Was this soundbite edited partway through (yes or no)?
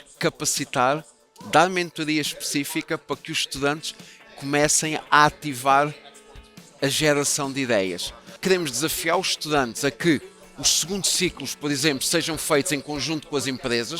yes